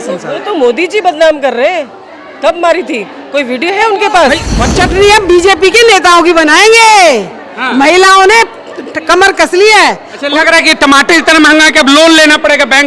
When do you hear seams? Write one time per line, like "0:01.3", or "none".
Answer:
0:04.5